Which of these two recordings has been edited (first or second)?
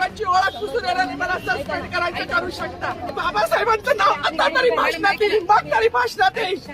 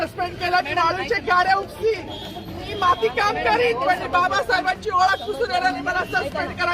first